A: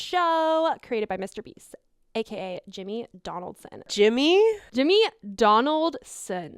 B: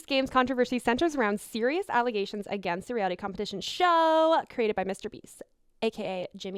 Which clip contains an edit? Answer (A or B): A